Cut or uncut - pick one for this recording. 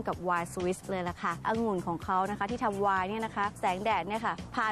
cut